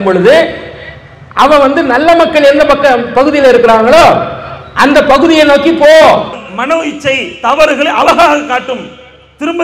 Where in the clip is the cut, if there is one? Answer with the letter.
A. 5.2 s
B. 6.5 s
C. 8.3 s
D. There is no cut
B